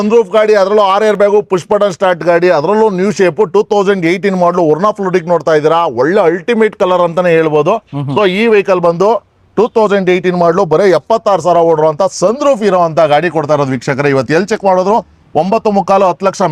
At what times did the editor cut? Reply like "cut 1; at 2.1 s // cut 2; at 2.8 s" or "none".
none